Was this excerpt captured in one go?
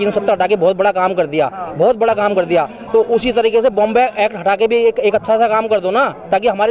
yes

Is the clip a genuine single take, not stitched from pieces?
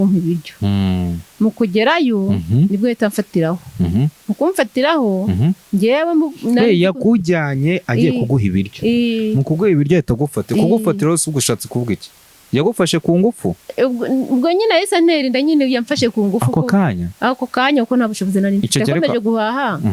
yes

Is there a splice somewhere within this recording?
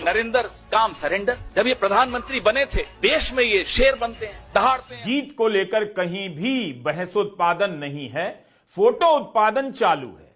yes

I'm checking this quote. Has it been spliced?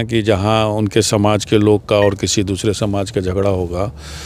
no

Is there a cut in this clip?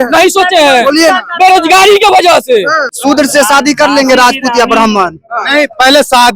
yes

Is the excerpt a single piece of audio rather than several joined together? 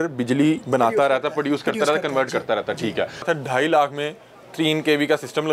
no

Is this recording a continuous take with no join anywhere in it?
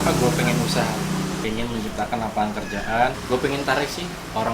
no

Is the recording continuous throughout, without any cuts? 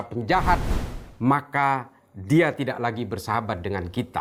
yes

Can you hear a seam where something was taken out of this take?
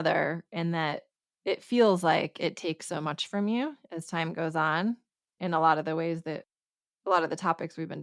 no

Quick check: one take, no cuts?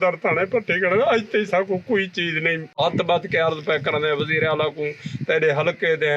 no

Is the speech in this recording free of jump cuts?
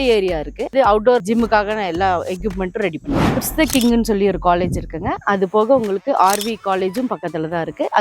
no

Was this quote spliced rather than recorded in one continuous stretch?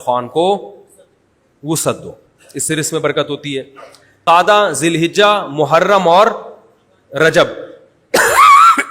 yes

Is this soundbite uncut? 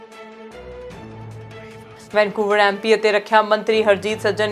yes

